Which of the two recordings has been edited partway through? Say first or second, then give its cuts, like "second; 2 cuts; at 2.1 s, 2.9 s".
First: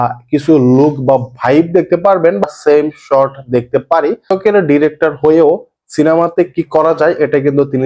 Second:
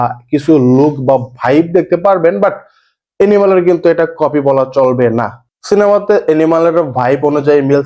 first; 2 cuts; at 2.4 s, 4.3 s